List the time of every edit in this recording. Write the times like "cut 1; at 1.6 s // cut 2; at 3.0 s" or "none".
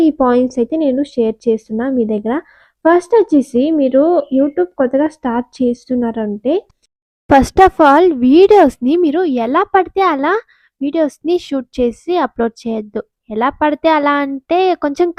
none